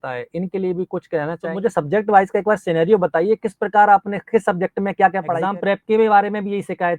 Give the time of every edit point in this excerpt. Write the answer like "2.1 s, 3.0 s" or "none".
1.5 s, 5.3 s